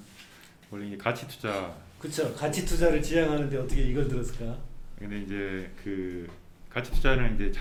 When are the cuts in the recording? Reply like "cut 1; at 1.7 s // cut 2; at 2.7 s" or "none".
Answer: none